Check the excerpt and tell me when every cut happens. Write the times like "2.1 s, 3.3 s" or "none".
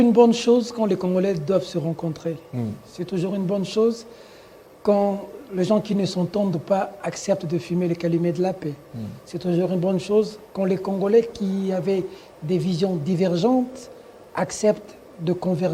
none